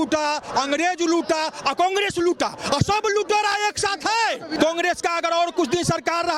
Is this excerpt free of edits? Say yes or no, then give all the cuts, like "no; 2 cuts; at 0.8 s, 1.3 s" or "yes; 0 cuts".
no; 1 cut; at 4.5 s